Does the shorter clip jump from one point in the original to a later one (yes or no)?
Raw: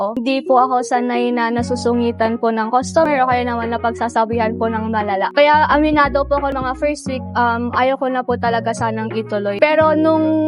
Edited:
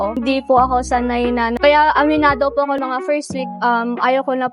yes